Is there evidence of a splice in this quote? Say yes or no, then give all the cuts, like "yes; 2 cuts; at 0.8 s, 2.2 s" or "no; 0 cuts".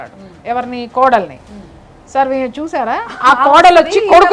no; 0 cuts